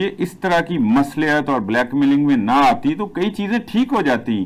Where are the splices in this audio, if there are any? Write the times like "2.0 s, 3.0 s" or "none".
none

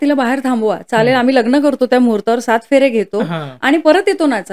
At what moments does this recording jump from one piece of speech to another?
none

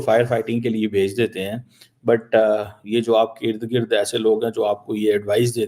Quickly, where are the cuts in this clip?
none

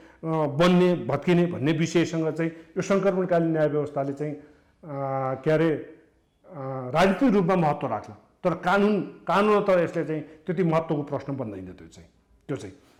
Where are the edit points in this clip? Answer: none

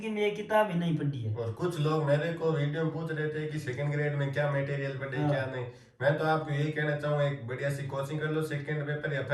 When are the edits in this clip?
none

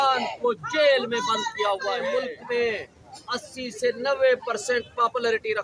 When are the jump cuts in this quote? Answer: 2.1 s

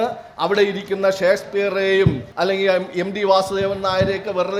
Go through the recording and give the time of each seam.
2.3 s

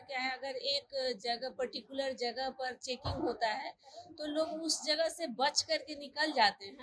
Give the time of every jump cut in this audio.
none

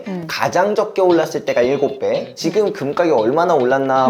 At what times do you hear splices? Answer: 2.4 s

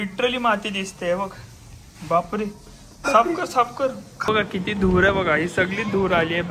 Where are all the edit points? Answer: 4.3 s

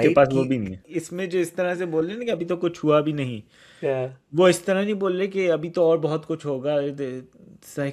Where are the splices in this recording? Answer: 0.9 s

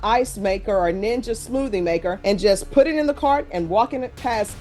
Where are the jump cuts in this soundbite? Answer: none

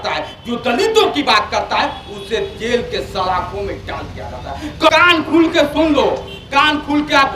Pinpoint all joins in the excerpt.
4.9 s

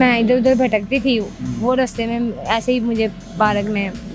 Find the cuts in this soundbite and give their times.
3.2 s

